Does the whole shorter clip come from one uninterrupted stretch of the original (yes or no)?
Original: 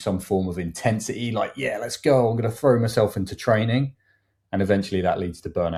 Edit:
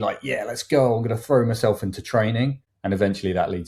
no